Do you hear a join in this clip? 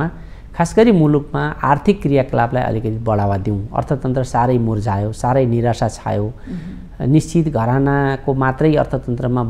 no; 0 cuts

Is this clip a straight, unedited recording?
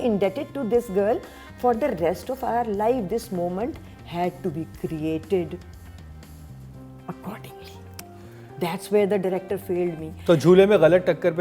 yes; 0 cuts

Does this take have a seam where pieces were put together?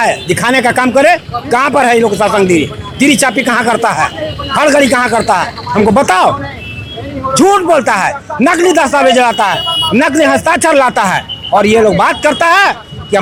no; 0 cuts

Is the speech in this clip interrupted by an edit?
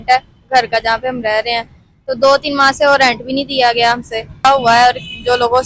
yes; 1 cut; at 4.4 s

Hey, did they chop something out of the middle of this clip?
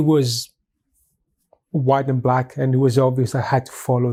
no; 0 cuts

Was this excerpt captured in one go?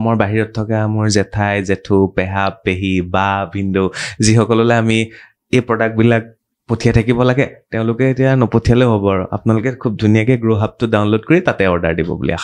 yes; 0 cuts

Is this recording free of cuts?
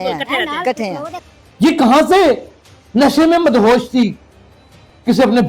no; 1 cut; at 1.2 s

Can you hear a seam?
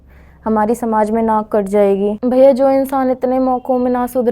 yes; 1 cut; at 2.2 s

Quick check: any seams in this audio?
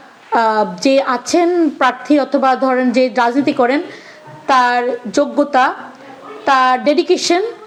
no; 0 cuts

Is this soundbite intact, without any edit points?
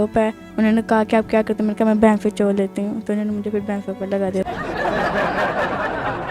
yes; 0 cuts

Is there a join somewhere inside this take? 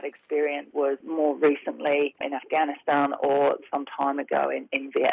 yes; 2 cuts; at 0.9 s, 2.3 s

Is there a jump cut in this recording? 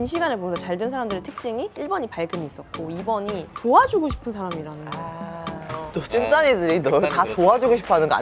no; 0 cuts

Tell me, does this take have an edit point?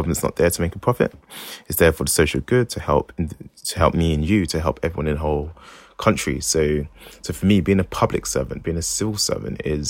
no; 0 cuts

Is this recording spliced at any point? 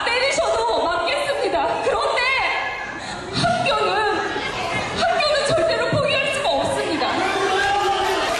yes; 1 cut; at 0.9 s

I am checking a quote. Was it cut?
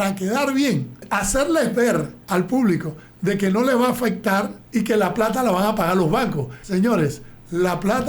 yes; 4 cuts; at 1.0 s, 2.2 s, 4.6 s, 6.5 s

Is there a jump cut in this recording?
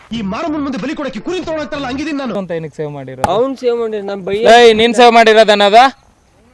yes; 1 cut; at 2.3 s

